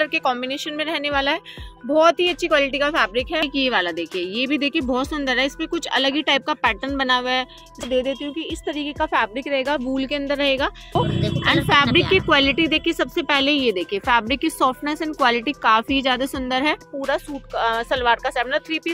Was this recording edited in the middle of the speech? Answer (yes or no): yes